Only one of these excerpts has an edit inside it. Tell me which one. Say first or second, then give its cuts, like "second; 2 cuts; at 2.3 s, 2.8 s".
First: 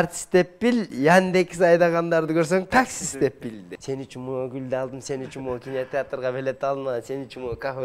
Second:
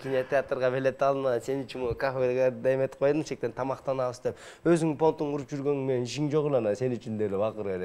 first; 1 cut; at 3.7 s